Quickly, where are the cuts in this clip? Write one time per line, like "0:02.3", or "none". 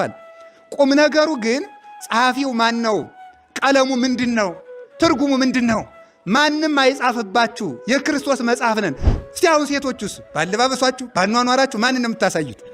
0:09.1